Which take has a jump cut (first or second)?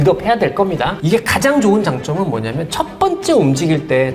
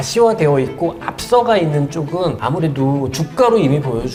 first